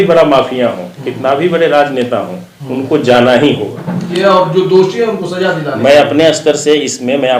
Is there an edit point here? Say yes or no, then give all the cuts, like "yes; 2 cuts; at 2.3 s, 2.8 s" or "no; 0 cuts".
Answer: yes; 1 cut; at 4.1 s